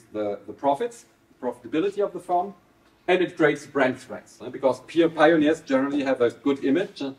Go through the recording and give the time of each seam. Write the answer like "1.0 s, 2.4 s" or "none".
3.0 s

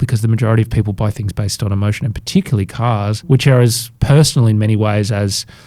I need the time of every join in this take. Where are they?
3.2 s, 3.9 s

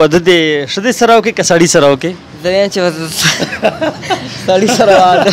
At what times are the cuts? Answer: none

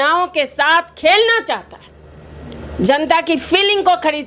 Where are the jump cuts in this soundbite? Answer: none

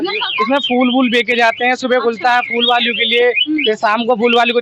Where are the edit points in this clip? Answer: none

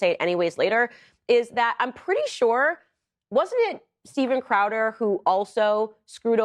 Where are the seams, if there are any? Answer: none

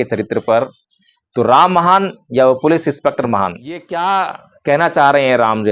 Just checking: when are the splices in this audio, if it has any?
3.9 s

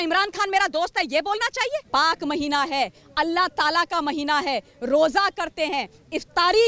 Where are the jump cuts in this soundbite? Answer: 1.8 s

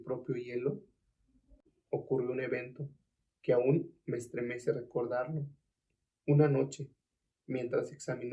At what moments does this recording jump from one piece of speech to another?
1.6 s

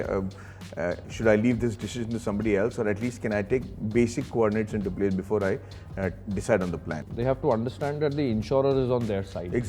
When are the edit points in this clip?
7.0 s

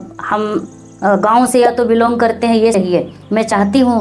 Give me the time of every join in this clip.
2.7 s

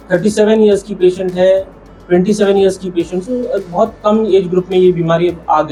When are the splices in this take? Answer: none

